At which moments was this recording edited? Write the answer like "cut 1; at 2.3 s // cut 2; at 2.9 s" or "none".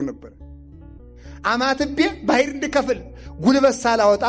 cut 1; at 0.9 s